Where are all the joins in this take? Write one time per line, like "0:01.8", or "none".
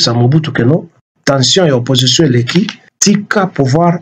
0:02.8